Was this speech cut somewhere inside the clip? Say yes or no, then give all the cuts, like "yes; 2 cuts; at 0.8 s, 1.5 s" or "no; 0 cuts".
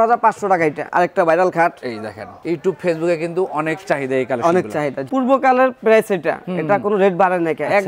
yes; 2 cuts; at 0.8 s, 5.0 s